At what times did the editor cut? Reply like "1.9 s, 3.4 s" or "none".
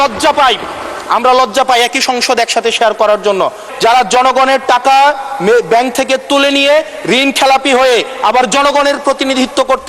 3.6 s

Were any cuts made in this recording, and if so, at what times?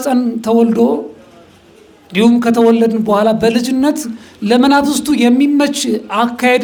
none

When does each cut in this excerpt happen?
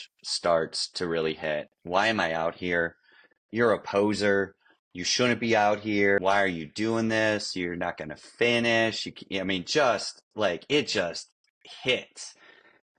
6.2 s

